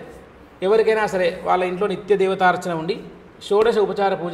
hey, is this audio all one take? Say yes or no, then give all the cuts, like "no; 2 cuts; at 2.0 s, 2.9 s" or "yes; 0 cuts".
yes; 0 cuts